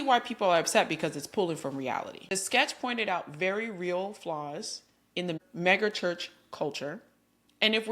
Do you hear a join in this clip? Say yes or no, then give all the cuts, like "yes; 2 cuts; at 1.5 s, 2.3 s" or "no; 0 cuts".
yes; 1 cut; at 2.2 s